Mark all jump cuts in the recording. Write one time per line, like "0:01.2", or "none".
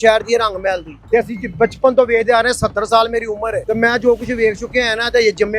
0:00.9
0:03.6